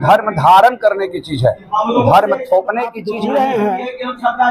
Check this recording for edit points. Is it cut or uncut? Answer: cut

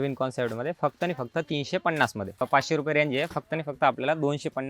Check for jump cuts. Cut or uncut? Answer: cut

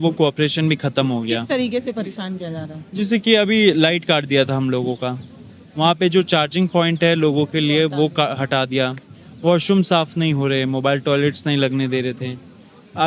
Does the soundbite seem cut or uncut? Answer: uncut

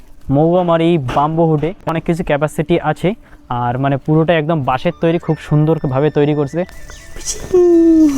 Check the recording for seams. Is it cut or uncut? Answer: cut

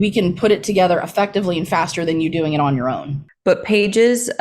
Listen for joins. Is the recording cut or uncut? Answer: cut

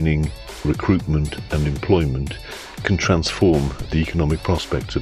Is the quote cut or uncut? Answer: cut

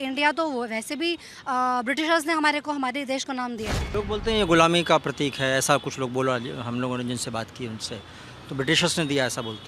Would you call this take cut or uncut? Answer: cut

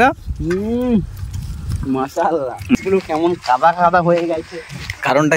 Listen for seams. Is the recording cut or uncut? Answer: cut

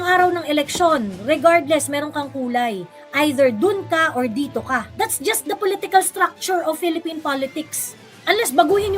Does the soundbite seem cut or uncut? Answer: cut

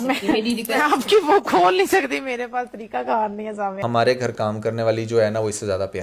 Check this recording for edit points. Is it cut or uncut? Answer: cut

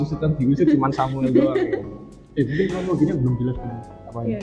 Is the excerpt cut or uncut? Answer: uncut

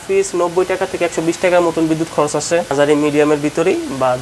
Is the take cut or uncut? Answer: cut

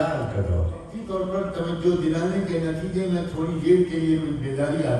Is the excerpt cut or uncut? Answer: cut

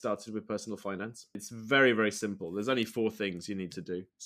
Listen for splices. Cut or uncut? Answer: cut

